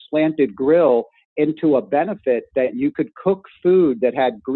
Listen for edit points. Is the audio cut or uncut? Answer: uncut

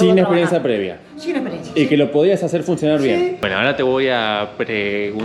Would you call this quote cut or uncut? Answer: cut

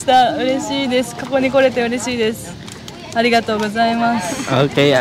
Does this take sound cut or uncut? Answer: uncut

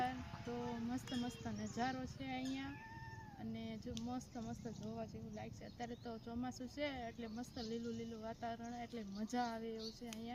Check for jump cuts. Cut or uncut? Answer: uncut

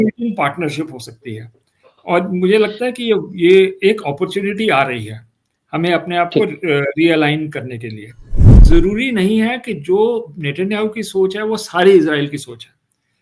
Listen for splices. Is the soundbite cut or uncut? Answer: cut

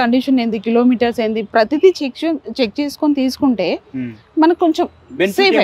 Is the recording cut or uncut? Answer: uncut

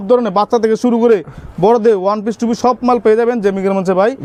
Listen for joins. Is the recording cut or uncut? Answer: uncut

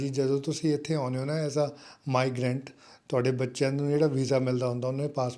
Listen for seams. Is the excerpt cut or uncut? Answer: uncut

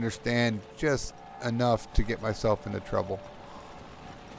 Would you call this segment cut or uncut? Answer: uncut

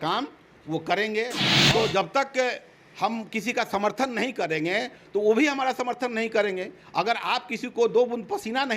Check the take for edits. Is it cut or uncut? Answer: cut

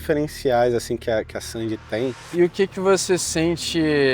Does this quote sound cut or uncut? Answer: cut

